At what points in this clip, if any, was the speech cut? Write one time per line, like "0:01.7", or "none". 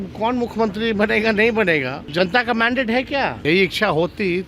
0:02.0
0:03.4